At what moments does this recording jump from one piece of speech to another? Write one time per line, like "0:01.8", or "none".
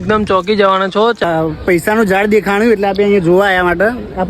0:01.2